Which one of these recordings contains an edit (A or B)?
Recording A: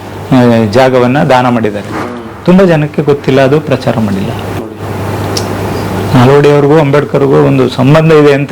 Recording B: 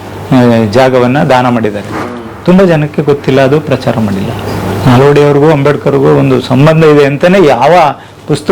B